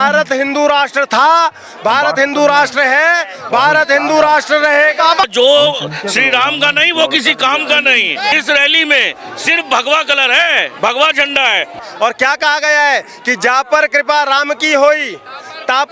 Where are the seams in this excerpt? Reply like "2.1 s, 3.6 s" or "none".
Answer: 5.3 s, 8.3 s, 11.8 s